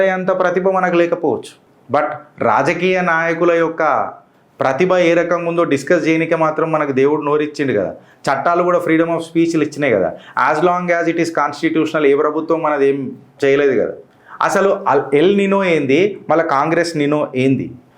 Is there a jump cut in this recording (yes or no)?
no